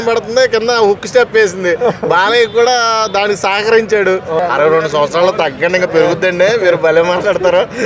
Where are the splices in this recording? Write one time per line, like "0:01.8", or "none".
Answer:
0:04.4